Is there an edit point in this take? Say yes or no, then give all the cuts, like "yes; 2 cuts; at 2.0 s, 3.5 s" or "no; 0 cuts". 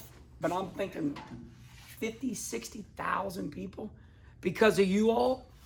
no; 0 cuts